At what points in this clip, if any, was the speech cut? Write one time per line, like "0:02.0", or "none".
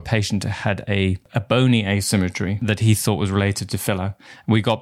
0:01.2
0:02.6

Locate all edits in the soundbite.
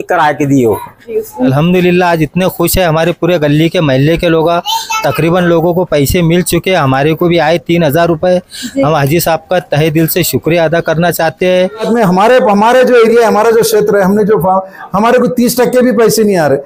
0:01.5
0:11.9

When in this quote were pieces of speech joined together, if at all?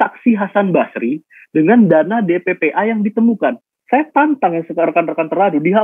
0:03.7

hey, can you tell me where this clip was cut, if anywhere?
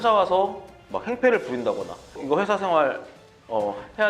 0:02.2

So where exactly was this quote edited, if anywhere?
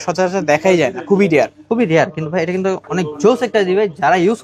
none

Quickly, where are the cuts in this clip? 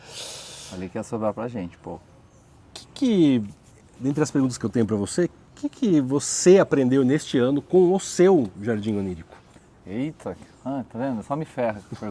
none

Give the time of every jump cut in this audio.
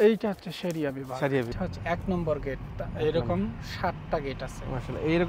0:01.5

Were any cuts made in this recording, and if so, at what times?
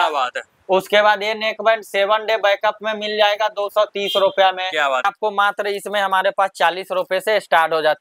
0:05.1

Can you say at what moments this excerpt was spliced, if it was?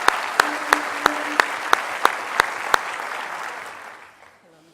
0:02.3

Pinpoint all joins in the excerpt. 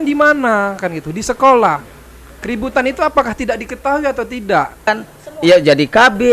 0:04.9

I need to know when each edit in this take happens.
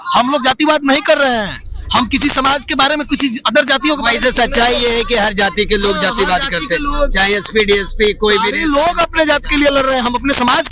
none

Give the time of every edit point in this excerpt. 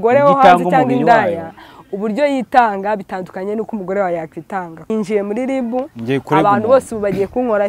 0:04.9

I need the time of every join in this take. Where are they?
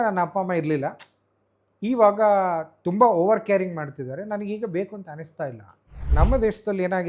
0:06.0

